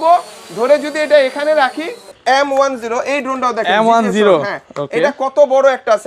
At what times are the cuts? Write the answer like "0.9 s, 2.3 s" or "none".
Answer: 2.1 s